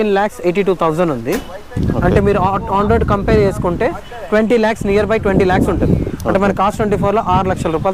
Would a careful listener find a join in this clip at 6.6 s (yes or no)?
no